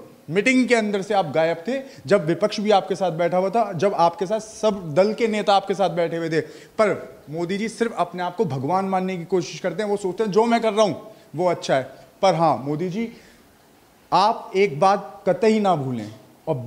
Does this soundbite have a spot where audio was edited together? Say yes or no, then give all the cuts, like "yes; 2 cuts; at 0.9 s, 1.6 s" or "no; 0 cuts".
no; 0 cuts